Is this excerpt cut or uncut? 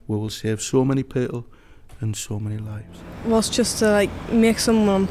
cut